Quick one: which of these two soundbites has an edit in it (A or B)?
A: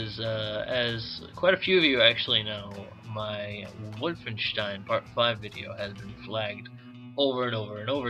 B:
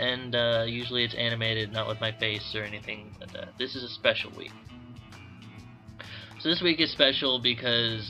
B